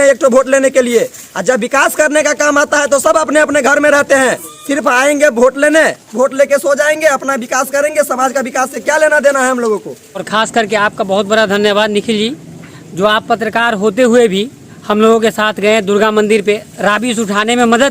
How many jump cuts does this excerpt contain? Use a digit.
3